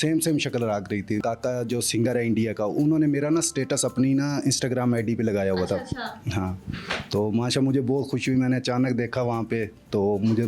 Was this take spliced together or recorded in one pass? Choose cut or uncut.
cut